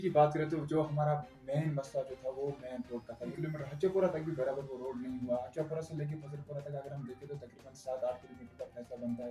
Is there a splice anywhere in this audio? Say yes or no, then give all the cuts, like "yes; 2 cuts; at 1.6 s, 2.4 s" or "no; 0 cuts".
no; 0 cuts